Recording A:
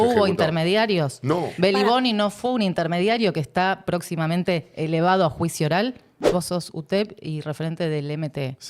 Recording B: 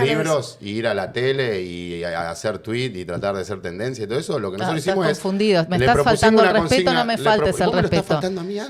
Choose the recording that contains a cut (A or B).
A